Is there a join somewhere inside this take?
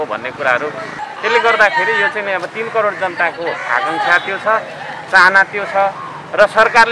yes; 1 cut; at 1.0 s

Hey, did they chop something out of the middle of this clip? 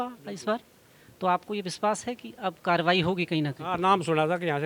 no; 0 cuts

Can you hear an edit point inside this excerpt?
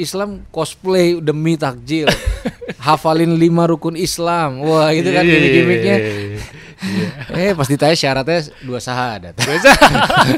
no; 0 cuts

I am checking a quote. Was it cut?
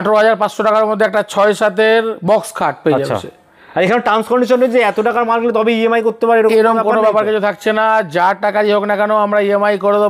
no; 0 cuts

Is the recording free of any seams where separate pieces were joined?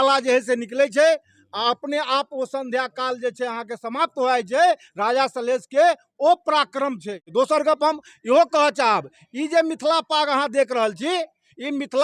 no; 1 cut; at 7.2 s

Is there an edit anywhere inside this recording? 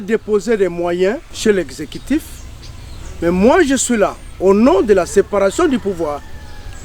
yes; 1 cut; at 1.3 s

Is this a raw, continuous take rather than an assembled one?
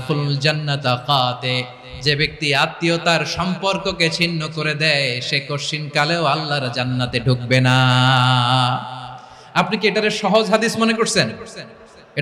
yes; 0 cuts

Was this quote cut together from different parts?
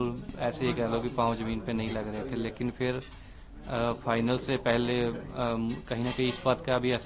no; 0 cuts

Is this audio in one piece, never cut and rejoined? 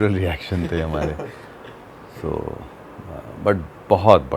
yes; 0 cuts

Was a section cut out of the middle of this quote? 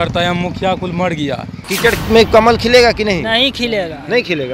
yes; 1 cut; at 1.6 s

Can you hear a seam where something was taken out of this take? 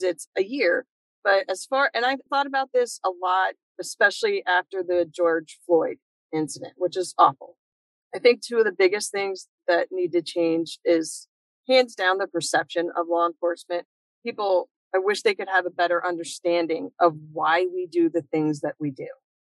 yes; 1 cut; at 2.3 s

